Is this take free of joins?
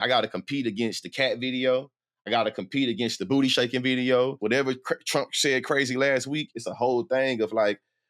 no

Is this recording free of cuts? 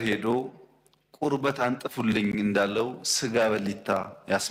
yes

